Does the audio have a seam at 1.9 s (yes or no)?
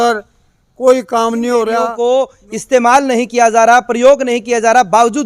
yes